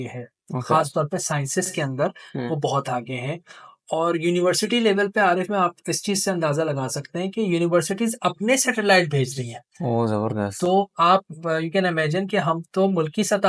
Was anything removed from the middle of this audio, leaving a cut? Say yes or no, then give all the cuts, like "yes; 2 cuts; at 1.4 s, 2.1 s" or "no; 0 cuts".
no; 0 cuts